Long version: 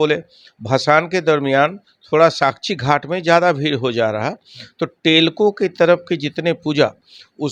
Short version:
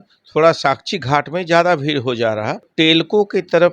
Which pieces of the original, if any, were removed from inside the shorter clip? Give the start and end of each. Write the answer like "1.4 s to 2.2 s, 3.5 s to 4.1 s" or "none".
4.4 s to 4.9 s